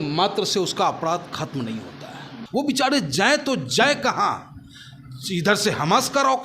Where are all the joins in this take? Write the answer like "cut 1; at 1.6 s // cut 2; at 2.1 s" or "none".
cut 1; at 2.3 s